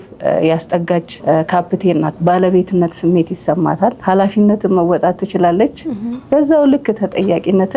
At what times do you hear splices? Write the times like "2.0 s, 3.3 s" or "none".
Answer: 1.1 s, 2.1 s, 4.0 s